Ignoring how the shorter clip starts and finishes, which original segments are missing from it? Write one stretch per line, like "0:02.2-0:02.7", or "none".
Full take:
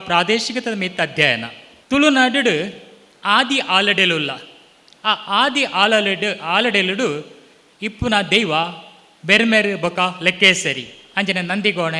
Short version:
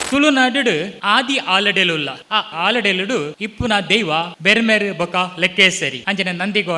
0:02.7-0:03.2
0:04.7-0:06.4
0:07.3-0:07.8
0:08.8-0:09.2
0:10.8-0:11.1